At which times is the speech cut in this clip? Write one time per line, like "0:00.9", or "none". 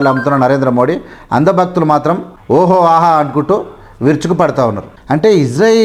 0:02.3
0:05.0